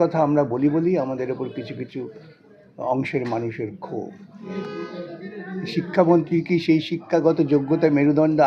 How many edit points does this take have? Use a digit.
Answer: 1